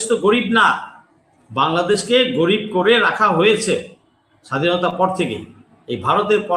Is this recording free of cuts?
yes; 0 cuts

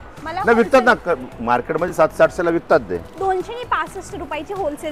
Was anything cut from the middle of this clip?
no; 0 cuts

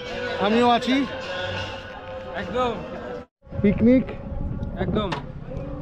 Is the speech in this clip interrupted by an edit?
yes; 1 cut; at 3.4 s

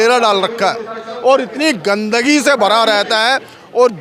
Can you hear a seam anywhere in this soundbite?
no; 0 cuts

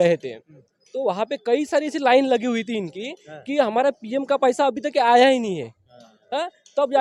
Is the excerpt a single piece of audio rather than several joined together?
yes; 0 cuts

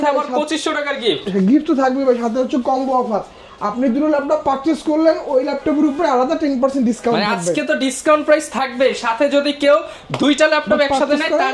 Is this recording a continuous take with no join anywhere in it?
yes; 0 cuts

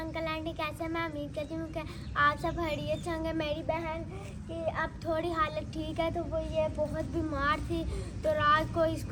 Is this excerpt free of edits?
yes; 0 cuts

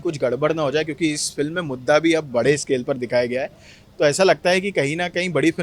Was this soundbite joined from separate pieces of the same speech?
no; 0 cuts

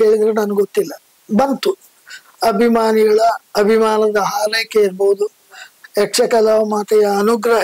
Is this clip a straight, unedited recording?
yes; 0 cuts

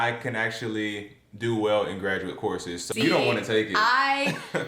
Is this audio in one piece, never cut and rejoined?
no; 1 cut; at 2.8 s

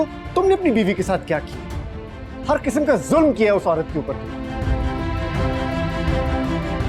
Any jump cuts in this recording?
no; 0 cuts

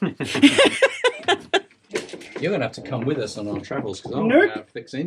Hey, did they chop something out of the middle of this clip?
yes; 1 cut; at 1.8 s

